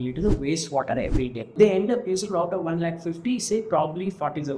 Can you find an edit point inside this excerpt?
yes; 1 cut; at 1.5 s

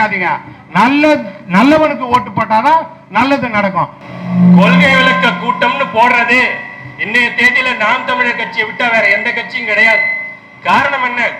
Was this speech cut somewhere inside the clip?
yes; 1 cut; at 4.0 s

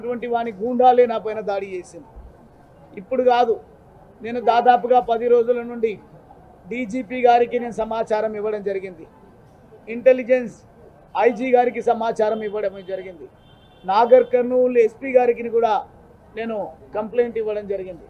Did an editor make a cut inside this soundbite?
no; 0 cuts

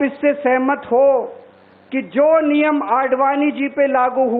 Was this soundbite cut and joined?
no; 0 cuts

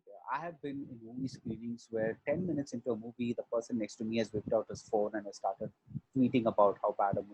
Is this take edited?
no; 0 cuts

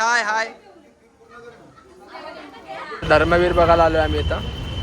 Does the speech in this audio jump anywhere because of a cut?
yes; 1 cut; at 3.0 s

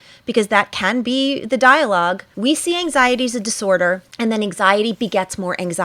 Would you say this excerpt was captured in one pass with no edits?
no; 2 cuts; at 2.3 s, 4.1 s

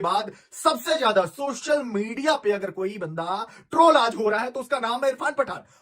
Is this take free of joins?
yes; 0 cuts

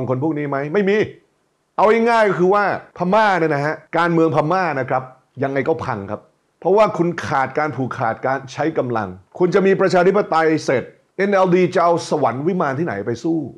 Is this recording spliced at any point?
no; 0 cuts

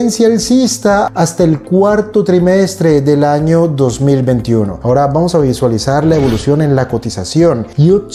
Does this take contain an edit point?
no; 0 cuts

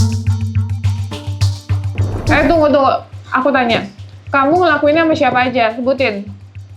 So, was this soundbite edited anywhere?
yes; 1 cut; at 2.3 s

